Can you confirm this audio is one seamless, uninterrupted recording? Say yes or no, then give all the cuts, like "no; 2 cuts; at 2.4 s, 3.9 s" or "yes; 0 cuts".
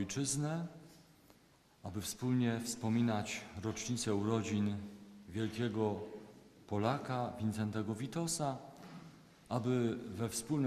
no; 1 cut; at 7.1 s